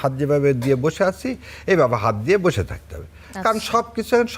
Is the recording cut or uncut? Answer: uncut